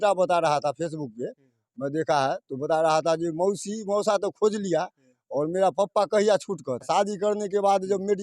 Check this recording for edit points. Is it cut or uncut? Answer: cut